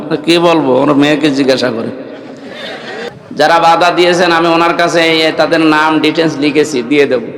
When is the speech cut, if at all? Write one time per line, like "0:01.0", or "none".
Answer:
0:03.1